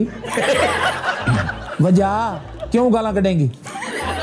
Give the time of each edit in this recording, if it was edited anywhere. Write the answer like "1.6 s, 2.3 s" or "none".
2.5 s